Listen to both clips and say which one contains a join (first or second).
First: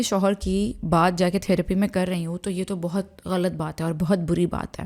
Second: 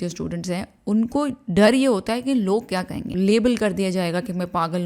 second